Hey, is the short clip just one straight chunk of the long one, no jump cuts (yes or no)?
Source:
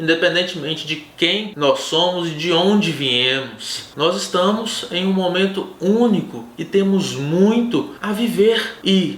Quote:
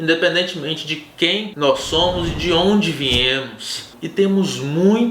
no